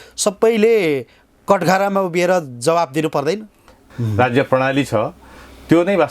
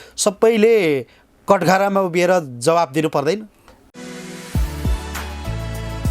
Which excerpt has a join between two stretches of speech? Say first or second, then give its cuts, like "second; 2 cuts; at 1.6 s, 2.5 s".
first; 1 cut; at 3.9 s